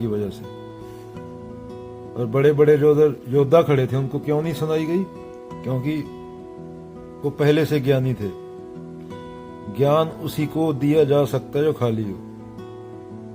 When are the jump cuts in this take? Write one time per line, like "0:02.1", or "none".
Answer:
0:12.1